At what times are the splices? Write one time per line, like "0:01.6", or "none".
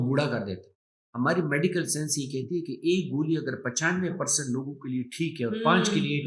0:01.0